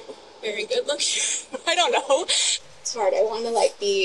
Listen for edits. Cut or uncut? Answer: cut